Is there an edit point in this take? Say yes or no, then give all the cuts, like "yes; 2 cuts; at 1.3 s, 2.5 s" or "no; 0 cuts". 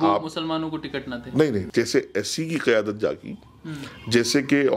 yes; 1 cut; at 1.7 s